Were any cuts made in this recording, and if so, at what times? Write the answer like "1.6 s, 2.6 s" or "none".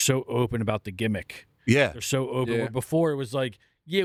none